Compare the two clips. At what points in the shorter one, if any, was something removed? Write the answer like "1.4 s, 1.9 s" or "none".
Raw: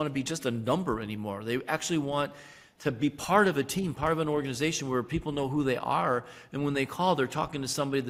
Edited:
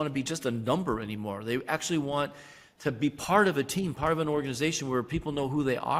none

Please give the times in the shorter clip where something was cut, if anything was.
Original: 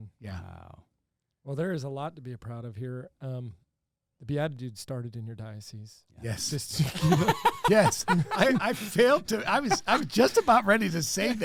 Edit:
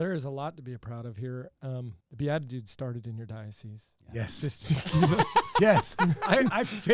2.0 s

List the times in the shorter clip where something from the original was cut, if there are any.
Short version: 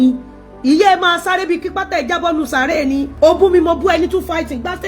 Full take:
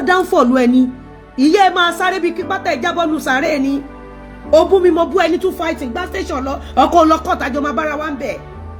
3.1 s

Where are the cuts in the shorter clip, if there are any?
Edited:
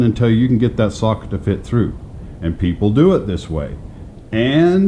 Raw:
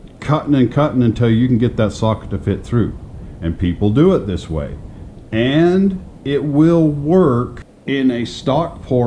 none

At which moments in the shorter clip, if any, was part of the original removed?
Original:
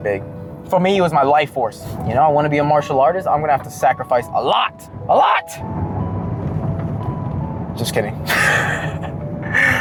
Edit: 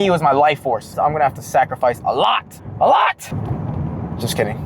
0.9 s, 3.3 s

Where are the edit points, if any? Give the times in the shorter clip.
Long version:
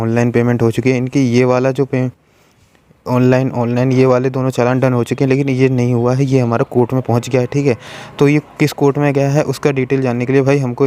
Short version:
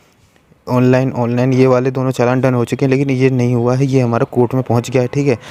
none

